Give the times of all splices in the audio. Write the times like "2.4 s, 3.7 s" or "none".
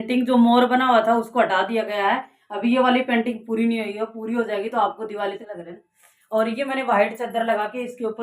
5.4 s

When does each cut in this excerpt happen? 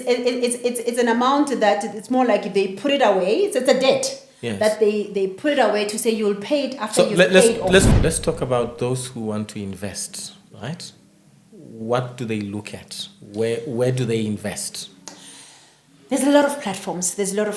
7.9 s

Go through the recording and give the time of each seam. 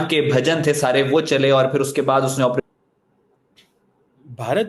2.6 s

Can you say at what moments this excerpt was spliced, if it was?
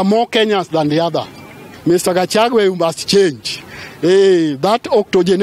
1.7 s

